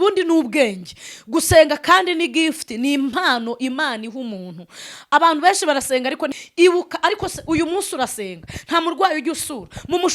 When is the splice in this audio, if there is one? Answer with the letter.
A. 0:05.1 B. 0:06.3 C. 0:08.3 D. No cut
B